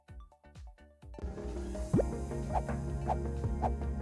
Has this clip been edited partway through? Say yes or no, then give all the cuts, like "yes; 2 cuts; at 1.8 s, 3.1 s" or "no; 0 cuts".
yes; 1 cut; at 1.2 s